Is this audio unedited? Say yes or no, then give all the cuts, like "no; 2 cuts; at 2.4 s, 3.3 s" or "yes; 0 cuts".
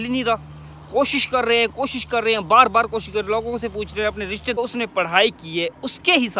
no; 1 cut; at 4.6 s